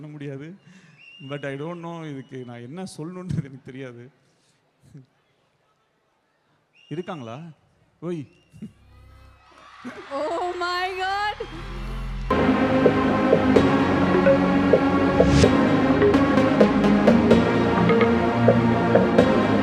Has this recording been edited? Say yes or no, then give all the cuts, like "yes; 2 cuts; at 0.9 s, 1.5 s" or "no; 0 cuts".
no; 0 cuts